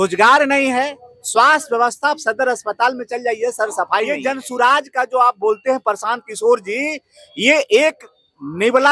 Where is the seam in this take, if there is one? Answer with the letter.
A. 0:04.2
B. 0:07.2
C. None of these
A